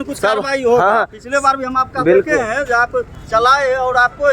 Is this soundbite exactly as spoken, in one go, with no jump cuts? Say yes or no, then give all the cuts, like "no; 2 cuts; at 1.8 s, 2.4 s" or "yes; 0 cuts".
yes; 0 cuts